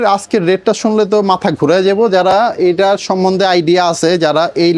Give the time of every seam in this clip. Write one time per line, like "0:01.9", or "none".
none